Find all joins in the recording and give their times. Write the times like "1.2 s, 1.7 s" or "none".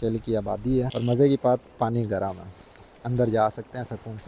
0.9 s